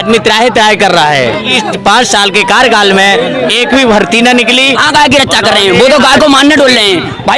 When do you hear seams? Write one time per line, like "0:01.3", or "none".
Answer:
0:01.5
0:04.8